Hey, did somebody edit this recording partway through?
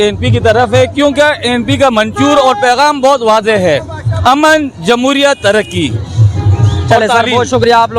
no; 0 cuts

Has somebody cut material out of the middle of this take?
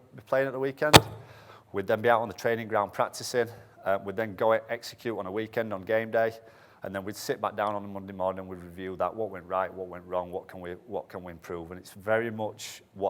no; 0 cuts

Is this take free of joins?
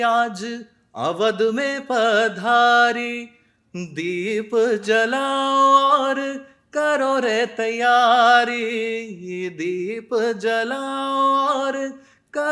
yes; 0 cuts

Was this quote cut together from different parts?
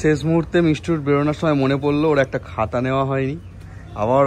no; 0 cuts

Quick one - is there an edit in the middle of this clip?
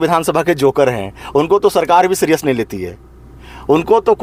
no; 0 cuts

